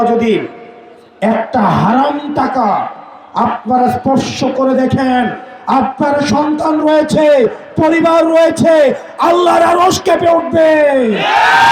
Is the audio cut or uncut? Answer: uncut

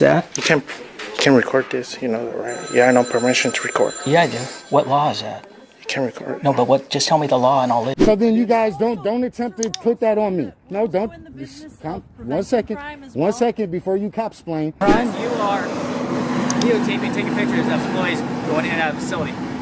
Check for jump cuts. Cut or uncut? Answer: cut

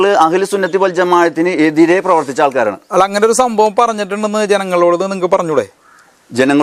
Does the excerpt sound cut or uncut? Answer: uncut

